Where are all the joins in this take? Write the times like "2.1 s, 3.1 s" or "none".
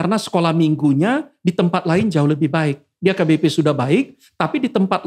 none